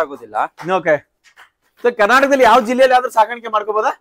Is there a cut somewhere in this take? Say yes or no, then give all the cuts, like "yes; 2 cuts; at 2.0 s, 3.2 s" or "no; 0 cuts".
no; 0 cuts